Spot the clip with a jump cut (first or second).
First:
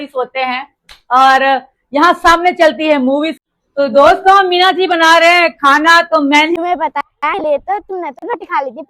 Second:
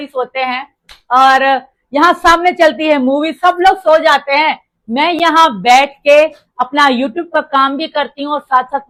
first